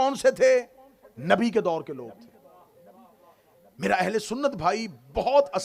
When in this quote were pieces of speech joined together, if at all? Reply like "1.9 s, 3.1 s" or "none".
none

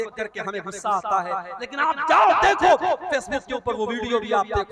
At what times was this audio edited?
none

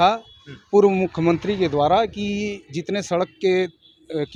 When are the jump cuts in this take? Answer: none

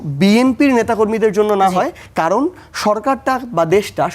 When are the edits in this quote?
2.0 s

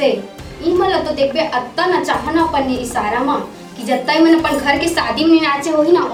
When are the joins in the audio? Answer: none

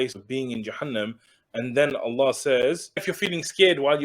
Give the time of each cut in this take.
3.1 s

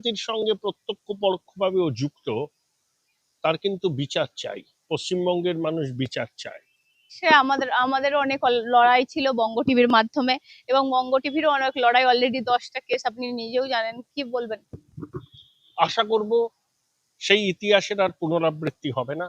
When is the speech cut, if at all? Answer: 7.1 s

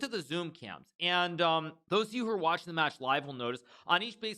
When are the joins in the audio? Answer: 1.8 s

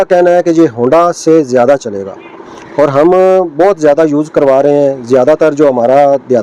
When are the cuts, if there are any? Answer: none

